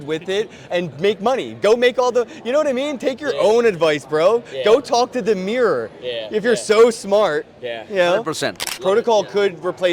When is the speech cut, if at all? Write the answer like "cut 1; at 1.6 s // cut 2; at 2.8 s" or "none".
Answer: cut 1; at 8.6 s